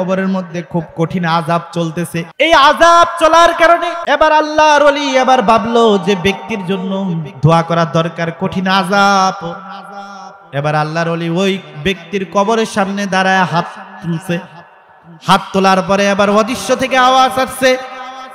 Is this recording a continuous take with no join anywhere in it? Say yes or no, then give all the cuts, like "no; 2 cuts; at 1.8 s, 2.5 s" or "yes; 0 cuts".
no; 2 cuts; at 2.3 s, 3.9 s